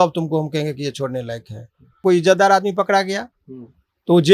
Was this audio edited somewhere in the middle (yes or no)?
yes